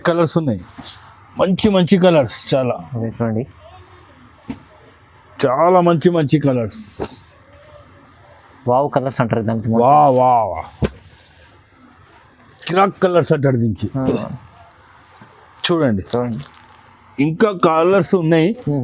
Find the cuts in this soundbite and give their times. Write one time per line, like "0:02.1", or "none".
none